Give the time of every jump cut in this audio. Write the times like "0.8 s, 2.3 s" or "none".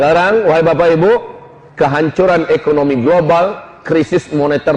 none